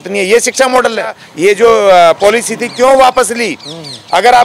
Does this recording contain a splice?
yes; 1 cut; at 1.2 s

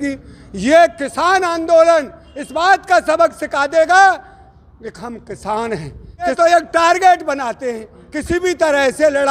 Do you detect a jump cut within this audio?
yes; 1 cut; at 6.3 s

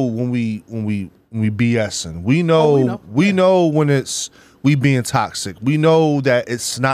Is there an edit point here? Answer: no; 0 cuts

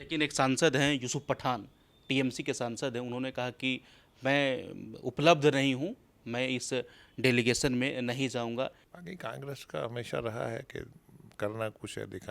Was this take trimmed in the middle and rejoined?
yes; 1 cut; at 8.9 s

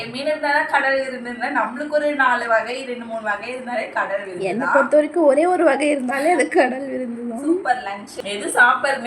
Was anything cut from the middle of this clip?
yes; 1 cut; at 8.1 s

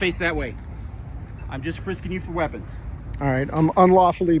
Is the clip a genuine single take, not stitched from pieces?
yes; 0 cuts

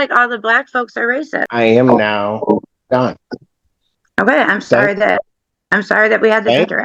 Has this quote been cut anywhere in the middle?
yes; 1 cut; at 1.5 s

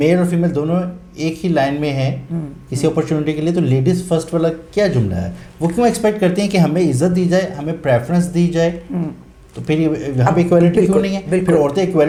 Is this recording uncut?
yes; 0 cuts

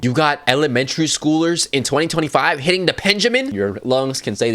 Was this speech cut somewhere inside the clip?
yes; 1 cut; at 3.5 s

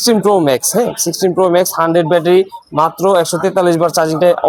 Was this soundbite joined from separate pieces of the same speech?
no; 0 cuts

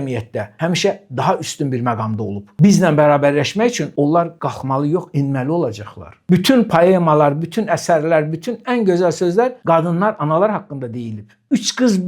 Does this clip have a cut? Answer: no; 0 cuts

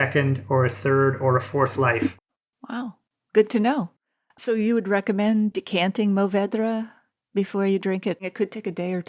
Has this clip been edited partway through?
yes; 2 cuts; at 5.5 s, 8.2 s

